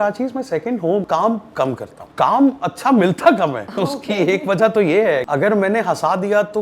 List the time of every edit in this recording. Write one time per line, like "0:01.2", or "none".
0:01.1
0:02.0
0:03.6
0:05.2